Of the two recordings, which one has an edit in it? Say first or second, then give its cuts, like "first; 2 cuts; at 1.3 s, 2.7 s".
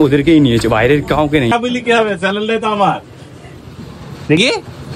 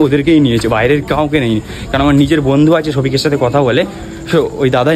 first; 1 cut; at 1.5 s